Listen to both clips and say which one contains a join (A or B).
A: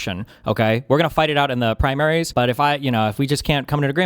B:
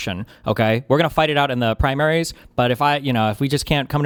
A